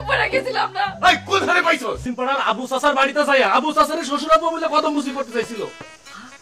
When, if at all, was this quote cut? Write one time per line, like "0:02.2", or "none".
0:02.0